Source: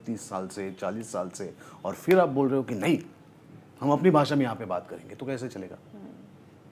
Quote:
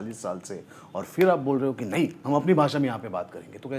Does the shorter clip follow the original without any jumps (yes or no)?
no